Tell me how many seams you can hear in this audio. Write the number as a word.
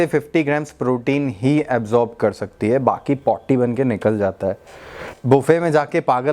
one